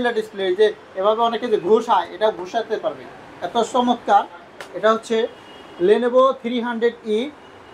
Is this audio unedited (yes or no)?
yes